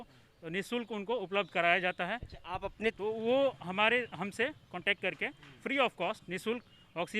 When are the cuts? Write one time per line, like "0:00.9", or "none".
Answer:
0:02.9